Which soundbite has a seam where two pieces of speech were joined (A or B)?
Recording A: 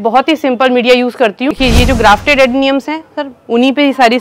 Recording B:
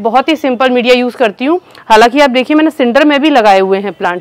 A